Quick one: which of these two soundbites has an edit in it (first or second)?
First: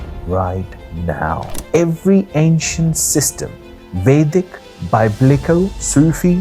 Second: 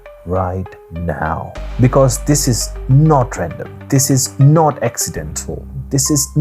first